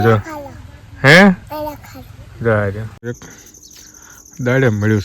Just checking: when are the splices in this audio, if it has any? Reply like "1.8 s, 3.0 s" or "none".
3.3 s

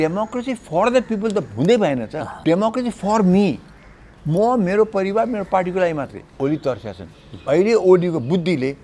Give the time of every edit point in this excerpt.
2.2 s, 6.4 s

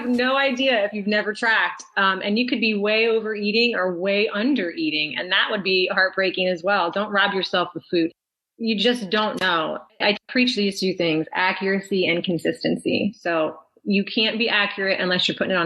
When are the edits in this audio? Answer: none

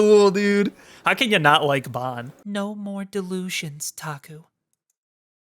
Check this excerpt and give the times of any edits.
2.3 s

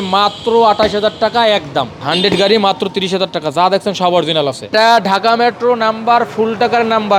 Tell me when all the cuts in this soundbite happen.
2.0 s, 4.7 s

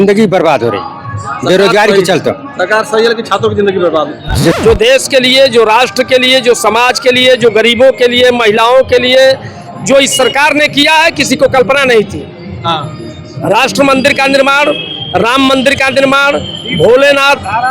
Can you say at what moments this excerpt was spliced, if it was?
4.6 s

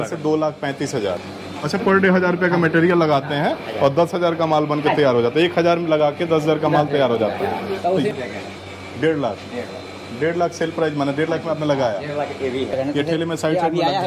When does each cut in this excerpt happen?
1.3 s, 8.1 s, 12.7 s

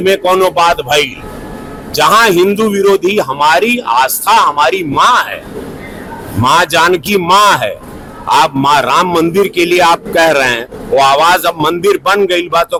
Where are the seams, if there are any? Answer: none

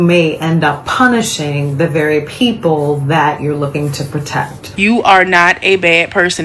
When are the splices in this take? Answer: 4.6 s

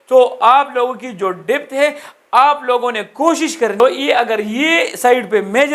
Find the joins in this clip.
3.8 s

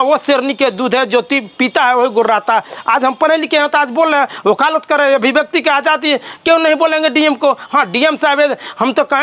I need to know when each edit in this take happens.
none

